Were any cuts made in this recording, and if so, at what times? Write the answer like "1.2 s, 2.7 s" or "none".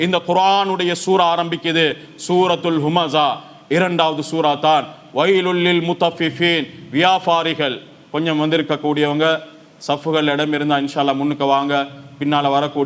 none